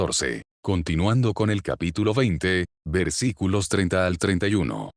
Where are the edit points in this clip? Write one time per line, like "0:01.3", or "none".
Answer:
none